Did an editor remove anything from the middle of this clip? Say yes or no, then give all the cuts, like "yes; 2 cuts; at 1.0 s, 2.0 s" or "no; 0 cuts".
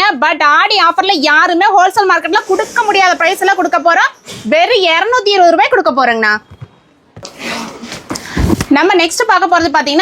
no; 0 cuts